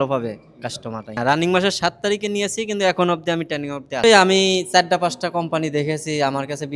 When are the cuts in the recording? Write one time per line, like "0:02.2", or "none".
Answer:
0:01.1
0:04.0